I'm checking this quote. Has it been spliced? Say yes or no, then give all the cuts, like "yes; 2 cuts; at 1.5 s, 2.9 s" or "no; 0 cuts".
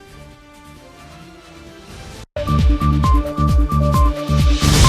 yes; 1 cut; at 2.3 s